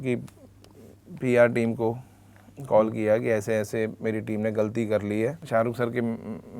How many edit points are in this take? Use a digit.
1